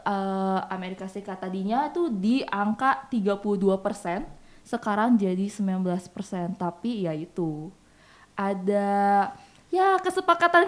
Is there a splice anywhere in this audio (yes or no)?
no